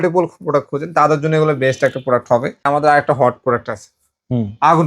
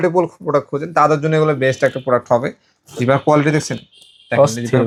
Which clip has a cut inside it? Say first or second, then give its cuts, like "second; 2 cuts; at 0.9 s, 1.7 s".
first; 1 cut; at 2.7 s